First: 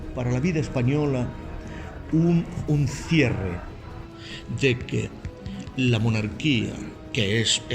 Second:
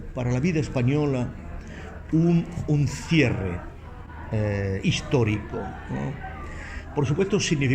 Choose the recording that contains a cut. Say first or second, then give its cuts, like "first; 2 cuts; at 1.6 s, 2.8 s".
first; 1 cut; at 4.1 s